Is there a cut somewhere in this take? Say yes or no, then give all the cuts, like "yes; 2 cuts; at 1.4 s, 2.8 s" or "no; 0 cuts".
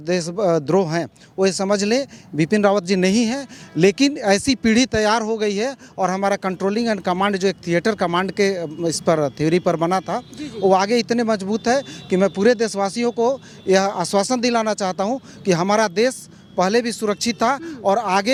no; 0 cuts